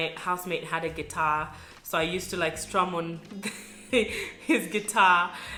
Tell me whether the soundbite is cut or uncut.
uncut